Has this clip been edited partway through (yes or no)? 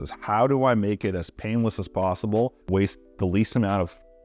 yes